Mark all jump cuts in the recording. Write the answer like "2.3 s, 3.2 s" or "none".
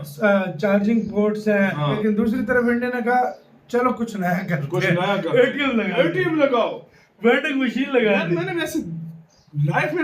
1.9 s